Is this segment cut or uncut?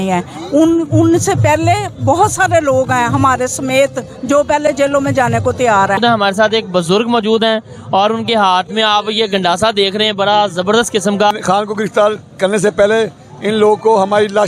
cut